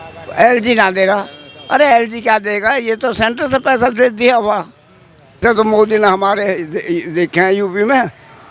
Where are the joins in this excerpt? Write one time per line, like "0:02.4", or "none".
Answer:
0:05.4